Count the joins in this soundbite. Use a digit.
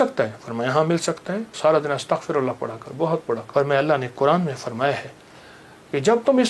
2